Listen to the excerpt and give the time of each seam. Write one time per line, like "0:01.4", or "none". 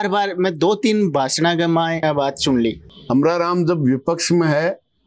0:02.0
0:02.9